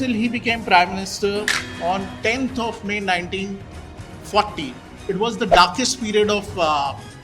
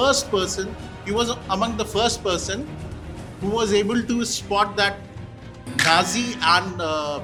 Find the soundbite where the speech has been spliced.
first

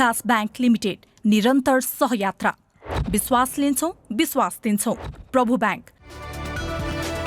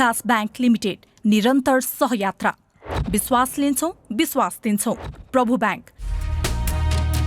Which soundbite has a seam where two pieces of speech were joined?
second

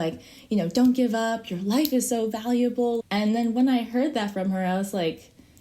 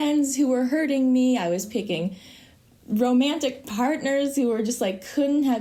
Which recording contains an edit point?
first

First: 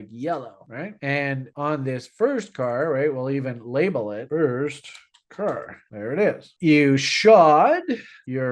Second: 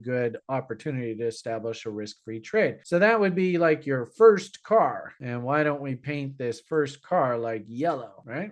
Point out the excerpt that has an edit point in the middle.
first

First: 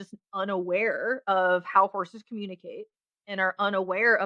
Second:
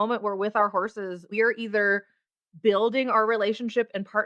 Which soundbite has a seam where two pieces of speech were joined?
second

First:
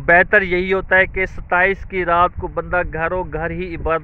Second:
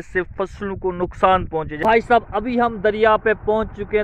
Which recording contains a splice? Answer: second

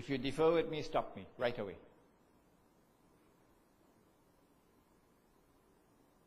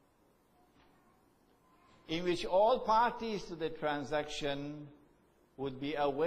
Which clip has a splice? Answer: second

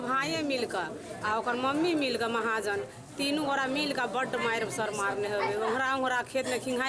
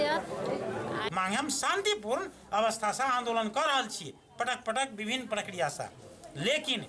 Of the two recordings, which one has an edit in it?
second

